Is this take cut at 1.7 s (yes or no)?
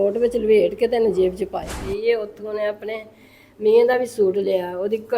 yes